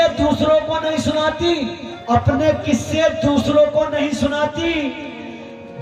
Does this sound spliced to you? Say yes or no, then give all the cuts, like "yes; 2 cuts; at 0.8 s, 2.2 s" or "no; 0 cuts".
yes; 1 cut; at 1.9 s